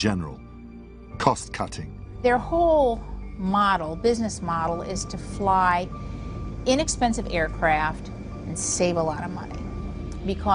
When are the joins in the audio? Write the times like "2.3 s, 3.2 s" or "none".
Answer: none